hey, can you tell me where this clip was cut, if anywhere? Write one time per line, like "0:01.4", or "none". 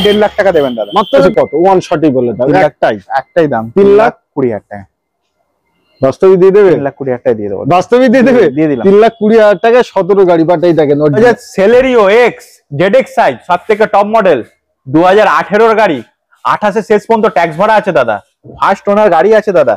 0:01.3
0:11.2